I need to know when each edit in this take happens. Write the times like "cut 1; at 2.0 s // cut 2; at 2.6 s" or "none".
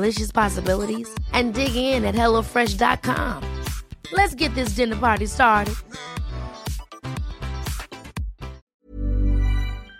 cut 1; at 8.6 s